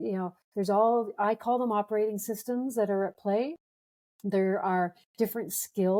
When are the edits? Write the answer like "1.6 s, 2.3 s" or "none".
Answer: none